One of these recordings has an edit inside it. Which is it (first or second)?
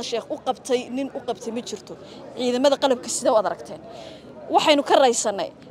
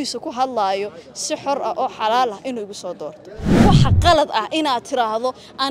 second